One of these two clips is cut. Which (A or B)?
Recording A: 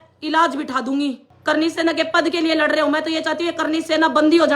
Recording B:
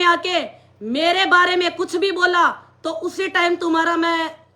A